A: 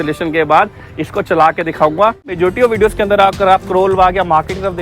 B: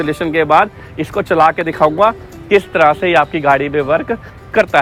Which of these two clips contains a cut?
A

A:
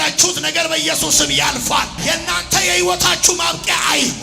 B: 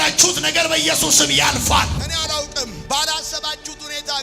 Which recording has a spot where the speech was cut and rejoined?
B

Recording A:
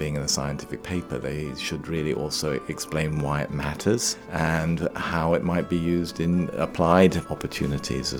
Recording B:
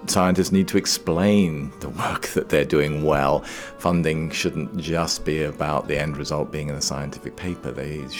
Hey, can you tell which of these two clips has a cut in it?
A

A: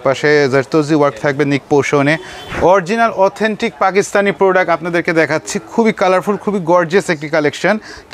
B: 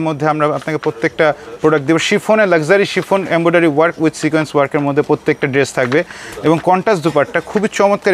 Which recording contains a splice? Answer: A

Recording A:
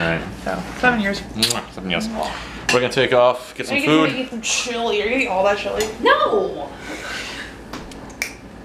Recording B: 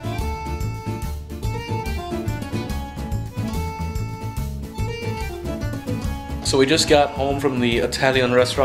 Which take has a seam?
A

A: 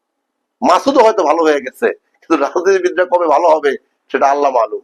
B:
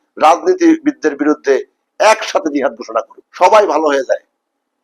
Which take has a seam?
B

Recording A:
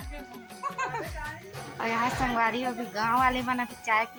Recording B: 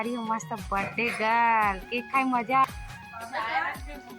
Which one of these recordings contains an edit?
B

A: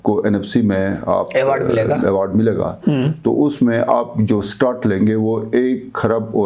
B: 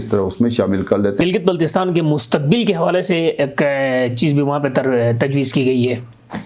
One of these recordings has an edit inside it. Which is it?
B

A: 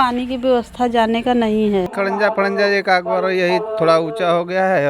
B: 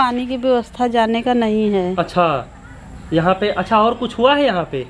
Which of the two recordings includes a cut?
A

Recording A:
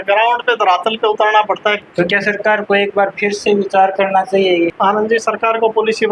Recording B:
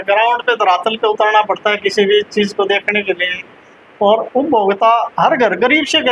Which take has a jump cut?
A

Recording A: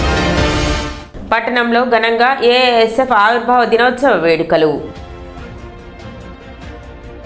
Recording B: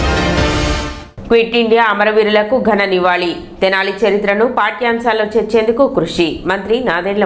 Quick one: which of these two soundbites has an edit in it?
B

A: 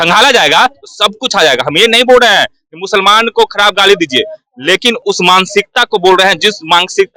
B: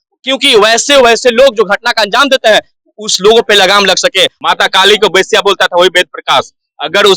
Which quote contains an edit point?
B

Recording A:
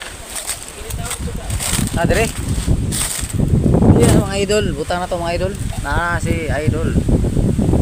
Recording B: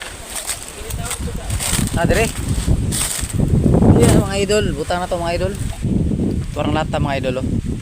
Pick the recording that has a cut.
B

